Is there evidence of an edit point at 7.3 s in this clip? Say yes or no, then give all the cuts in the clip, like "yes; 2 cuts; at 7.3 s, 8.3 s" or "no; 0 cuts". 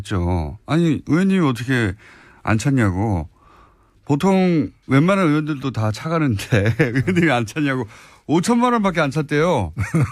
no; 1 cut; at 1.8 s